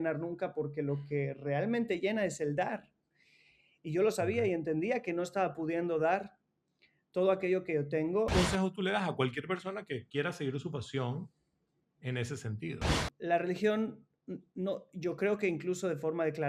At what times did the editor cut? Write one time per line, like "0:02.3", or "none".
0:08.3
0:12.9

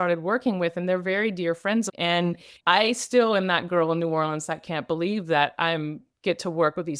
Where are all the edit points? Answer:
0:01.9

